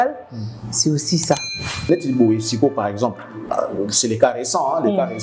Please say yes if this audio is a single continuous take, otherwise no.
no